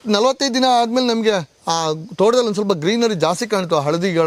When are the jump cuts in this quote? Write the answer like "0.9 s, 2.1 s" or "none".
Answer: none